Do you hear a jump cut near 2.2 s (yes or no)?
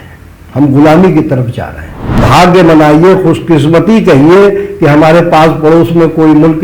yes